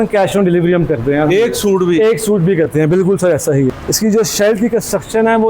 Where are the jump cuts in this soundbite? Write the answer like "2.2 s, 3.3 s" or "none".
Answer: 3.7 s